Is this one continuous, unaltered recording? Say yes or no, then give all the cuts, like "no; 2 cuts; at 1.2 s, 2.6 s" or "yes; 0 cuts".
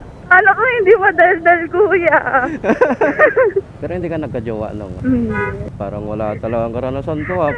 no; 2 cuts; at 3.8 s, 4.9 s